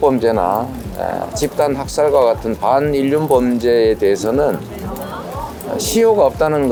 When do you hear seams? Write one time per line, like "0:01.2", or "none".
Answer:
none

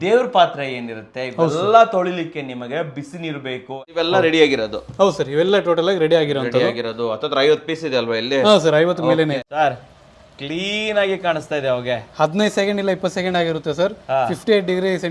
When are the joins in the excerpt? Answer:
0:03.8
0:09.3

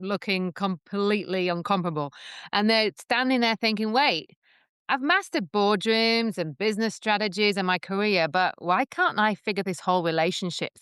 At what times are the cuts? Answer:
none

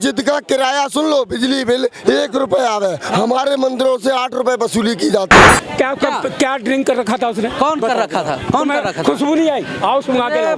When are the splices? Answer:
0:05.5

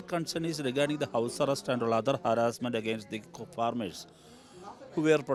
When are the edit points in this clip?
none

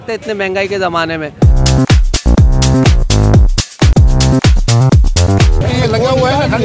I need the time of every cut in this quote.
0:03.9
0:05.6

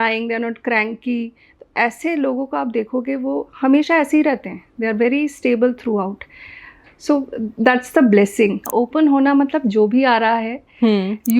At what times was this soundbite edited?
0:08.6

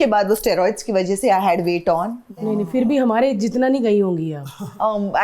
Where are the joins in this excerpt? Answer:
none

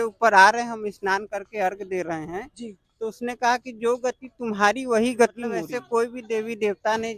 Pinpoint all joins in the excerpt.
0:05.7

